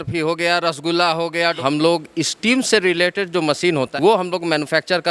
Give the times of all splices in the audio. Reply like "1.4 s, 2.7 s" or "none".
1.6 s, 3.9 s